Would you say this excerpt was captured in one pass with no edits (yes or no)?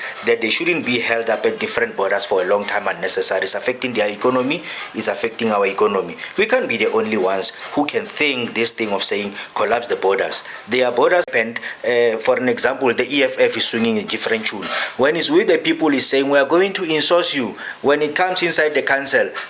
no